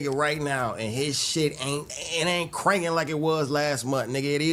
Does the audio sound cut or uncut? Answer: cut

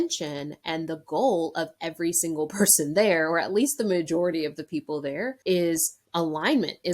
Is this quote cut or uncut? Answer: cut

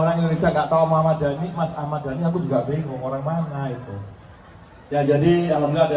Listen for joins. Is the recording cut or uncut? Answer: uncut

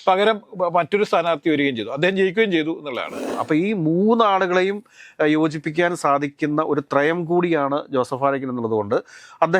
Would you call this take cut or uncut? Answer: cut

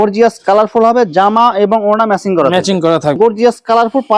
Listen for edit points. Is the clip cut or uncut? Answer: cut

